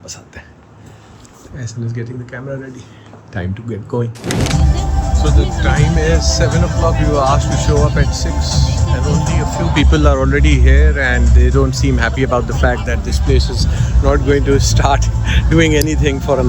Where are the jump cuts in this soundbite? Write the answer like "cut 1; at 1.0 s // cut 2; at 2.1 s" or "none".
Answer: none